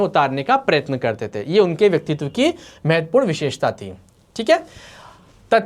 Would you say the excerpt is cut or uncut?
uncut